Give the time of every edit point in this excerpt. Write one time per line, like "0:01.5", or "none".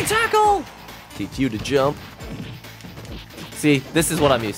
none